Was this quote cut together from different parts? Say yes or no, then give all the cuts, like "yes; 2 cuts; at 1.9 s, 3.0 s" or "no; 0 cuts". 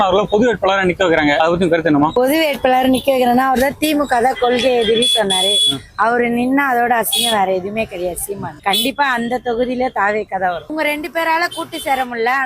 yes; 3 cuts; at 1.4 s, 8.6 s, 10.7 s